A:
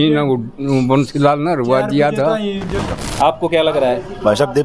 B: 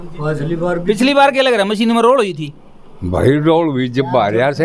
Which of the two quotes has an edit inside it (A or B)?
A